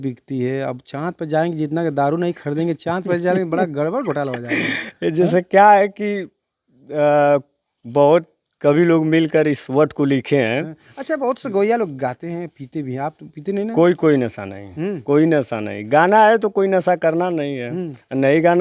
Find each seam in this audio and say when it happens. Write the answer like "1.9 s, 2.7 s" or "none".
none